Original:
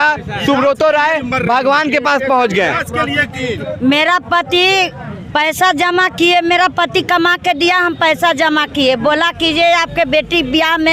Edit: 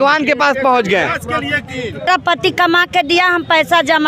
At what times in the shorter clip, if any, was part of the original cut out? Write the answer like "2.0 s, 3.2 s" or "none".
2.1 s